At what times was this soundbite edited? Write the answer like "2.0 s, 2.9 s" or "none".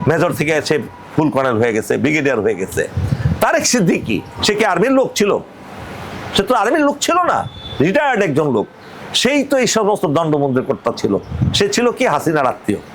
none